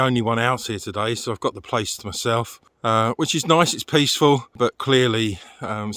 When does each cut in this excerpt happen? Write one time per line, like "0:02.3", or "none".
none